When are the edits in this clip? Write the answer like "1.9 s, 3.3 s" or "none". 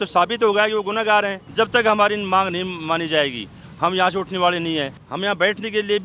1.4 s, 5.0 s

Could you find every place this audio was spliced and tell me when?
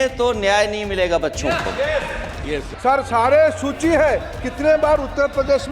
2.7 s

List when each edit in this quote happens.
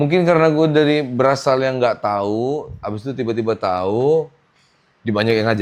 none

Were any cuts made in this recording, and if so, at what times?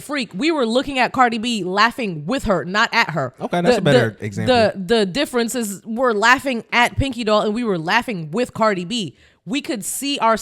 none

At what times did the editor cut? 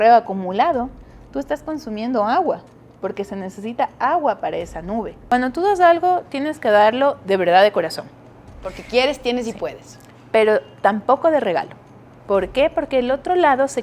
5.1 s

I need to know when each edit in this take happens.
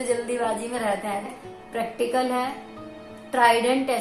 1.3 s

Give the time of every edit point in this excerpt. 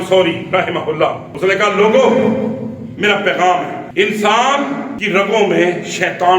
1.3 s, 3.8 s, 4.9 s

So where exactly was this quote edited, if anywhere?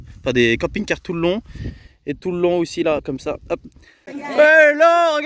4.2 s

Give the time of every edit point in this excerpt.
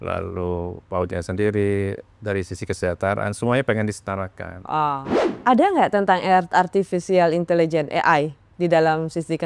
5.1 s

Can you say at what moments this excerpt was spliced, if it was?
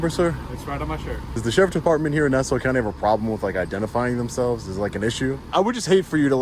1.3 s, 5.5 s

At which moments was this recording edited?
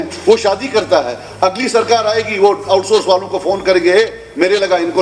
none

